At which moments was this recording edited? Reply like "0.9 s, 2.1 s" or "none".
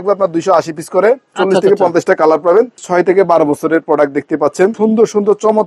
1.4 s, 2.8 s, 4.7 s